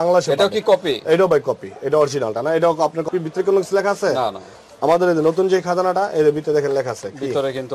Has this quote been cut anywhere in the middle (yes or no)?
yes